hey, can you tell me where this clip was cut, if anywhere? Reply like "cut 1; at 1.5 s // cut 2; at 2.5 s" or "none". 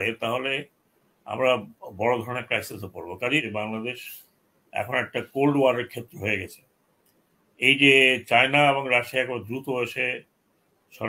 cut 1; at 3.5 s